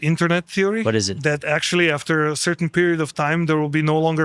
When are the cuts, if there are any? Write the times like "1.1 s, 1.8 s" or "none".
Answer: 1.1 s